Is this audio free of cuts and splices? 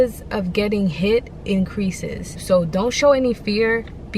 no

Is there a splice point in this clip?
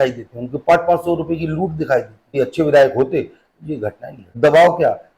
yes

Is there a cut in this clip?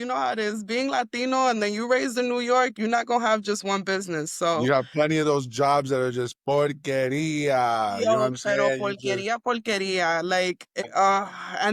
yes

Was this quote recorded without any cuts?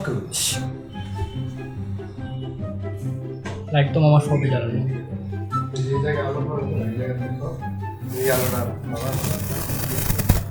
yes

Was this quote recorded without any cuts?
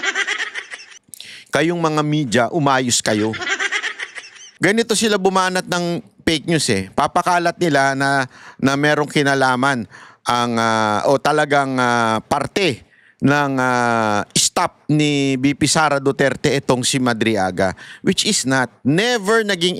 yes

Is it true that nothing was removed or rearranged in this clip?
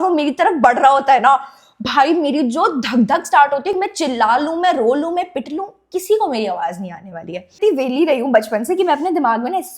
no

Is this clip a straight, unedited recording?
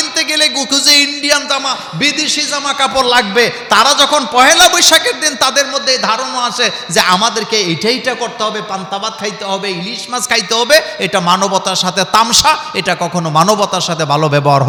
yes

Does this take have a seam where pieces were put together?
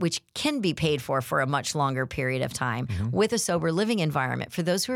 no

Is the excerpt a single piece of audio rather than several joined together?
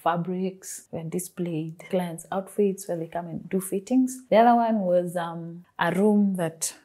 no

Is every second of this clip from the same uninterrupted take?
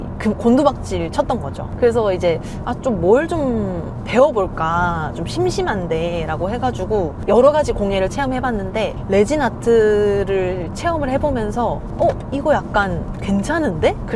no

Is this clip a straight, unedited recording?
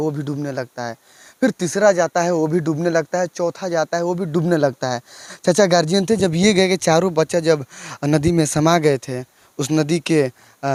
yes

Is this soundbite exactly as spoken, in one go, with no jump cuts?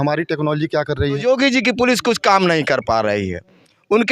no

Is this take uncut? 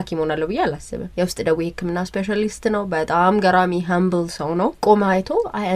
no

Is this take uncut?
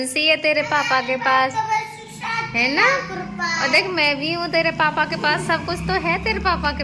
yes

